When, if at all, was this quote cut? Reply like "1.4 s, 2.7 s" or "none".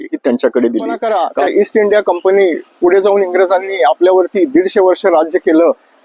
1.0 s